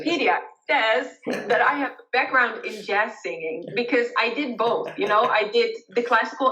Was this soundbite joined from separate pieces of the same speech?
no; 0 cuts

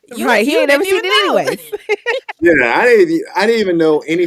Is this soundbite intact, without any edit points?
yes; 0 cuts

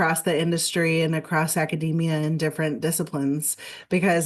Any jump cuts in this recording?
no; 0 cuts

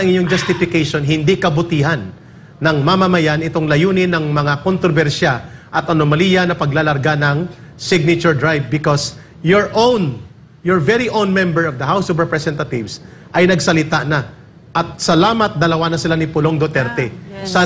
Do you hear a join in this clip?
no; 0 cuts

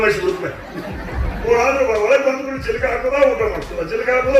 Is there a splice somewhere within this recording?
yes; 1 cut; at 1.5 s

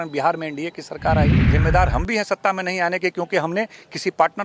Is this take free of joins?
no; 1 cut; at 1.5 s

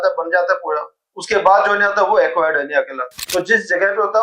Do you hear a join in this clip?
yes; 1 cut; at 3.2 s

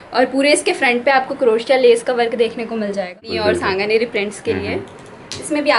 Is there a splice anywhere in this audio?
yes; 1 cut; at 3.3 s

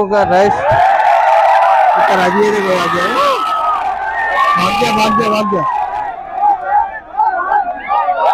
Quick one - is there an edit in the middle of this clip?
no; 0 cuts

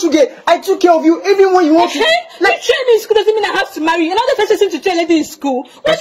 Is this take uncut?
yes; 0 cuts

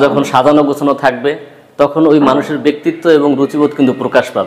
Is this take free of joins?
yes; 0 cuts

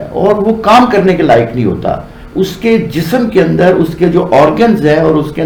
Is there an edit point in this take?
no; 0 cuts

